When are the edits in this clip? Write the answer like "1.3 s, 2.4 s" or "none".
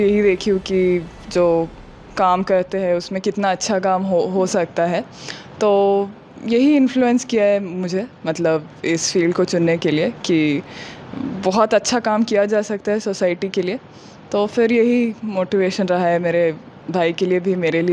none

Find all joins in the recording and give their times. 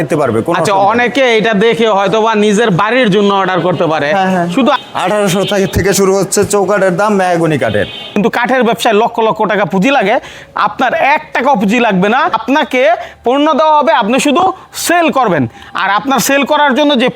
4.8 s, 8.1 s, 12.4 s

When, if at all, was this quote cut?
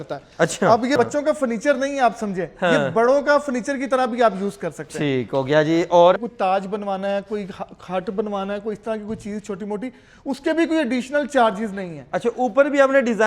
1.0 s, 6.2 s

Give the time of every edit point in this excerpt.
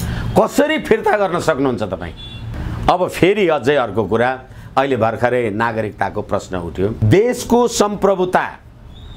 7.0 s

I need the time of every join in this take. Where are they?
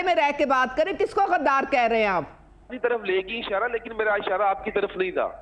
2.7 s

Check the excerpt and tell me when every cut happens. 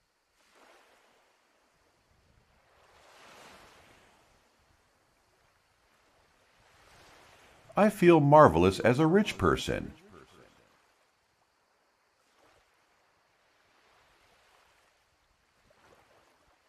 7.7 s, 10.8 s

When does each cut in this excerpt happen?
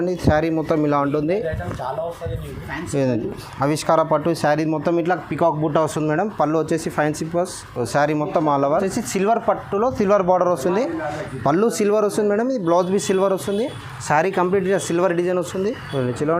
8.7 s

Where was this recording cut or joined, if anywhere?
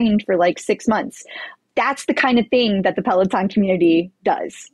1.6 s

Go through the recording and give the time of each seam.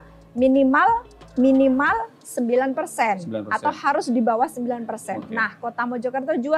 none

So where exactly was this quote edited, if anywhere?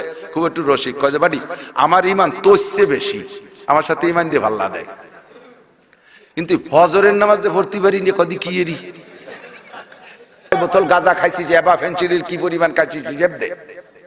10.5 s

